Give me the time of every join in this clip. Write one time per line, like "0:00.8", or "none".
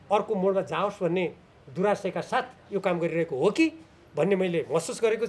none